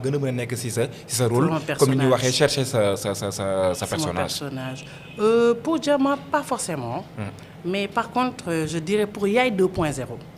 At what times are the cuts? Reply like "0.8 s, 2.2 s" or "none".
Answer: none